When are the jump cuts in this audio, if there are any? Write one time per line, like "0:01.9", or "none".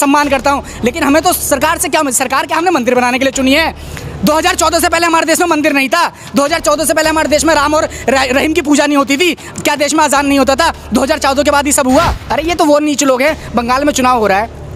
0:12.2